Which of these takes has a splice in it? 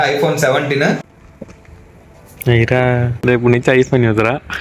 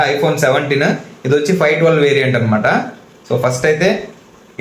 first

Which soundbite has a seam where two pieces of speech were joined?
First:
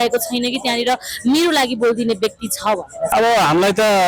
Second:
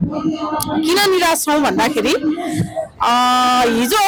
first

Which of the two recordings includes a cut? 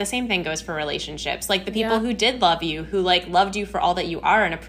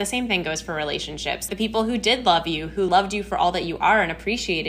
second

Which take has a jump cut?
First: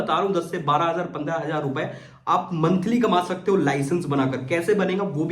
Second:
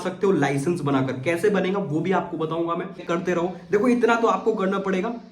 second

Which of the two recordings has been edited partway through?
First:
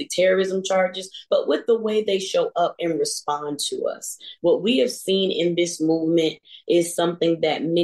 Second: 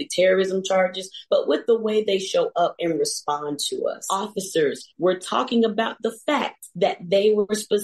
second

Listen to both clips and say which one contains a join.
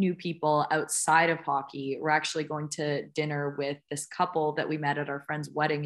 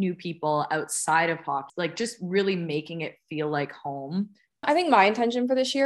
second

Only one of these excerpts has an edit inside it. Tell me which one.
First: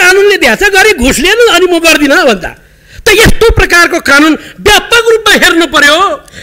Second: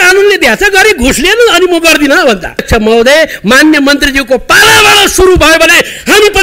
second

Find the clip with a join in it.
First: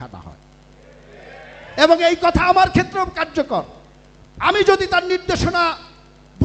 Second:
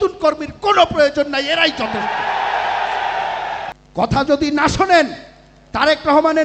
second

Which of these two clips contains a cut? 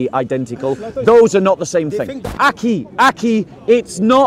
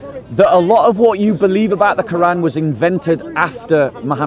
first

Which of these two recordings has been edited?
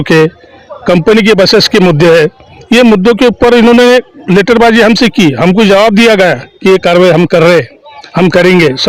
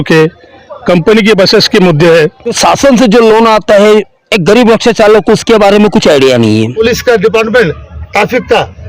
second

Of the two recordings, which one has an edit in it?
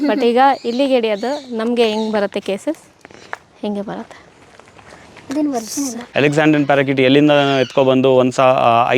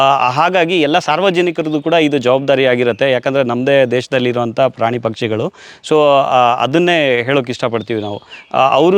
first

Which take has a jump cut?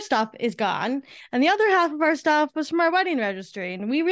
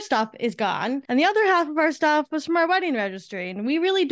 second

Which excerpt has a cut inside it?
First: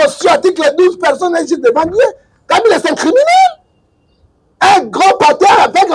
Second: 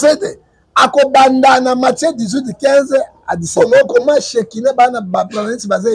second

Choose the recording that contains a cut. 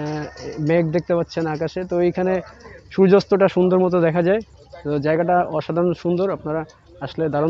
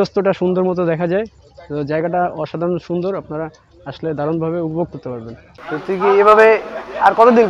second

